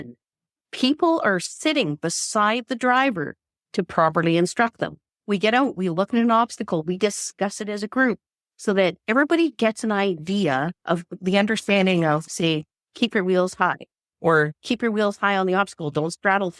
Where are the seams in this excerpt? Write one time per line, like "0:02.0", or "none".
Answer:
0:05.1